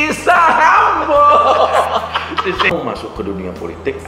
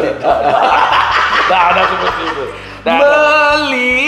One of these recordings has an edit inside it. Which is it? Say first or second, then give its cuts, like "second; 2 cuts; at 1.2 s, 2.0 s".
first; 1 cut; at 2.7 s